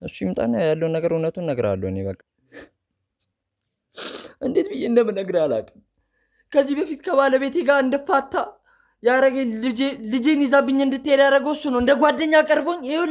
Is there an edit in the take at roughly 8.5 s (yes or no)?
no